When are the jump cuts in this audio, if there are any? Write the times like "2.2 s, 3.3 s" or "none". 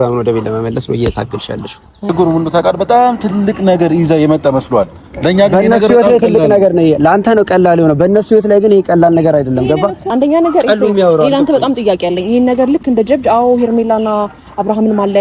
2.0 s, 10.1 s